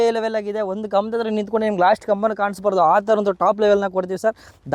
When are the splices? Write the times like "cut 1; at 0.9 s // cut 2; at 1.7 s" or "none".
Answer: none